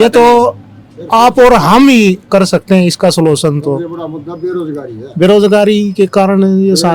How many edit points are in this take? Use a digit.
0